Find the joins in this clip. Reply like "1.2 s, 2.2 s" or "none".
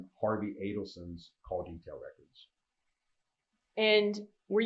3.6 s